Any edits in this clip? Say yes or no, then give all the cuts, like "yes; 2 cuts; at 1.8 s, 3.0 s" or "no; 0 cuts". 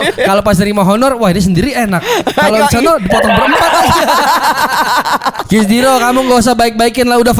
yes; 1 cut; at 5.3 s